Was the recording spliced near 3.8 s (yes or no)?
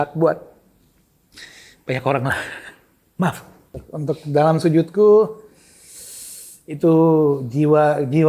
yes